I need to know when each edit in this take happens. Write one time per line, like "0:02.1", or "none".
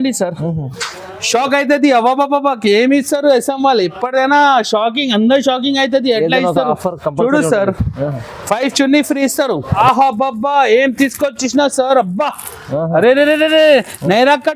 0:09.7